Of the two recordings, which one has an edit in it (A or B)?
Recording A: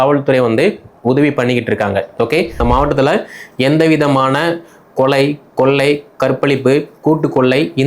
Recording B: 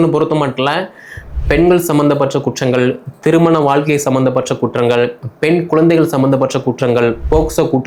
A